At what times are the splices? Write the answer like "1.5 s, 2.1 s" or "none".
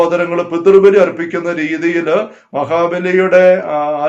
none